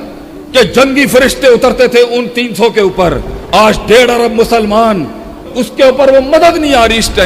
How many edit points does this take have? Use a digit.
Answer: 1